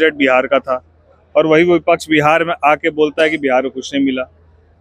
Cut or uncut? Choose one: uncut